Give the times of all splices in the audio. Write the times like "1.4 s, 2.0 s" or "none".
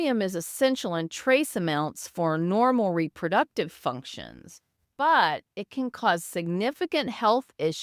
4.8 s

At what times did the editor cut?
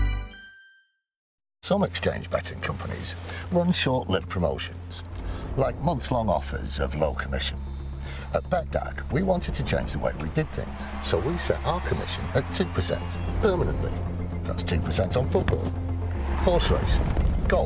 1.2 s

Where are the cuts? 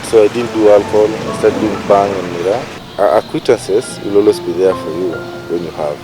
2.8 s

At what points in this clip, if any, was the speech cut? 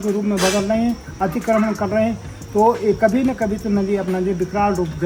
none

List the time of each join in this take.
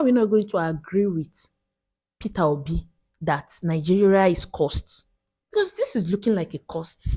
none

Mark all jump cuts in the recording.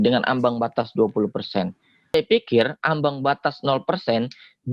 2.1 s

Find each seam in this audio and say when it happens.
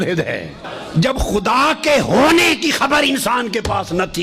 1.0 s

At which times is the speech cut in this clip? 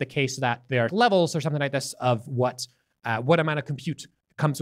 0.9 s

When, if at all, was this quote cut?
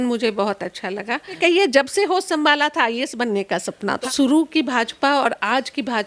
1.4 s, 4.0 s

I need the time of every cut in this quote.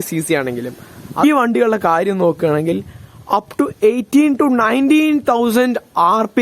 1.2 s

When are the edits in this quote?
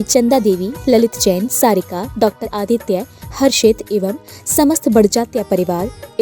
2.5 s

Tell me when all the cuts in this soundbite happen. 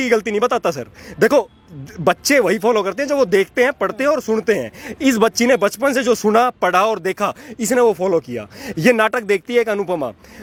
none

